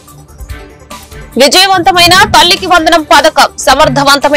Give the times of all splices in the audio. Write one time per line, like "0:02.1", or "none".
0:01.2